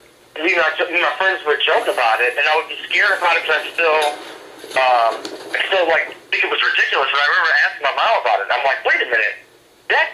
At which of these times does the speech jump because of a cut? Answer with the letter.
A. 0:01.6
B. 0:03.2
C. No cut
A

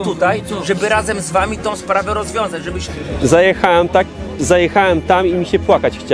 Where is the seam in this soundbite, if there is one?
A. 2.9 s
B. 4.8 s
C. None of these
A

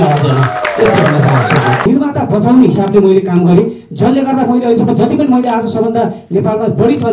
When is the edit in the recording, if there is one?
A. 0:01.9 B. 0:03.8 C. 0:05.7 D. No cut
A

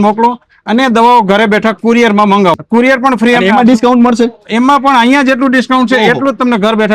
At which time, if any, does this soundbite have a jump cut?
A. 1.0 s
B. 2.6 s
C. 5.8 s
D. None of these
B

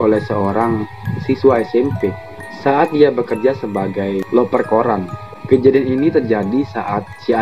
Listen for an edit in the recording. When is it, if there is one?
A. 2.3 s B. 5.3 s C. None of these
C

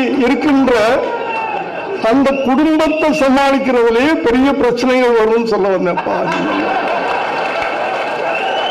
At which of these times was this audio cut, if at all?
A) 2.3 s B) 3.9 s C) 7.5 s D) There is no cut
D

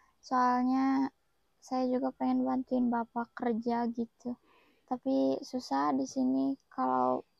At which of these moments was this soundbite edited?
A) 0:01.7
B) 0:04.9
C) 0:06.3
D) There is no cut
D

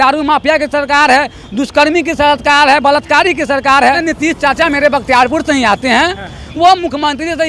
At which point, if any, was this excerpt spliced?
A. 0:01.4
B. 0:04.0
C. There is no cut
B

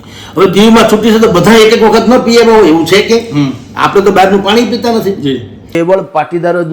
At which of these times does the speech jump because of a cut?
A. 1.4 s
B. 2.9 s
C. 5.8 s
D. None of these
C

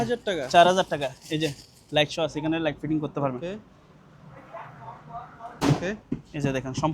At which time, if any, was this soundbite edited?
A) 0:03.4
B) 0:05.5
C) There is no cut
B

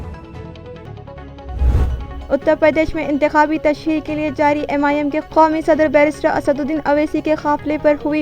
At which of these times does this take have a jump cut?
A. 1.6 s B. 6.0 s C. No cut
A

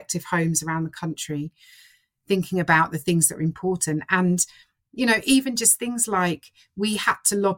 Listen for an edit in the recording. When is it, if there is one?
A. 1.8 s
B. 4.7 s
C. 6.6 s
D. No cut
D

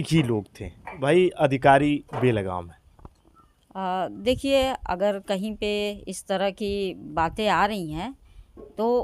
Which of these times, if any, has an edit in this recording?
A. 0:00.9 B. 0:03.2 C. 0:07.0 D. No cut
A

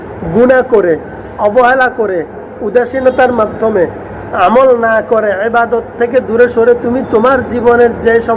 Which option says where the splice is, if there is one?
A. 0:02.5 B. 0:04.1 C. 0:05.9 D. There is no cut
D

